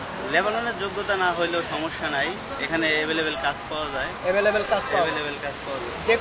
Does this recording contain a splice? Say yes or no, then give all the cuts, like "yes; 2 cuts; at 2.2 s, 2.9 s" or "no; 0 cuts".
no; 0 cuts